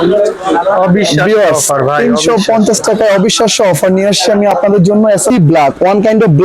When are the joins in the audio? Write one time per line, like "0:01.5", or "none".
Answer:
0:05.3